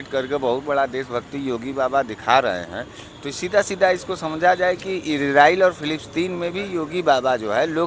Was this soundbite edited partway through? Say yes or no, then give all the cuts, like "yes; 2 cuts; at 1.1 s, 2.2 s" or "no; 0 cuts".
no; 0 cuts